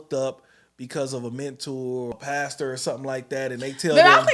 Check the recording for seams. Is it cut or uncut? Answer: cut